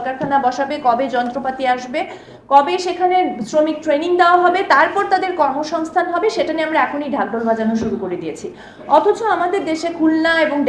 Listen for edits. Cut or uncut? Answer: uncut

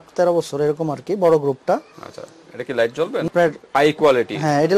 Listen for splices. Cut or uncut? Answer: cut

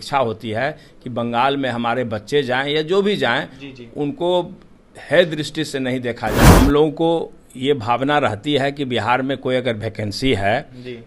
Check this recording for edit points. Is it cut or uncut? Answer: cut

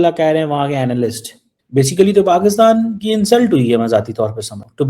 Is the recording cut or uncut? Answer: cut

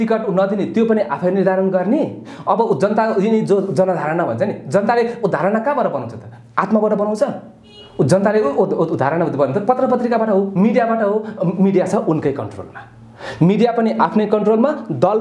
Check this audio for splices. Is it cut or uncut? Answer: uncut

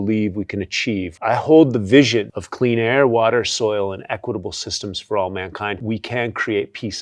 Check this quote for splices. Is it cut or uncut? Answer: cut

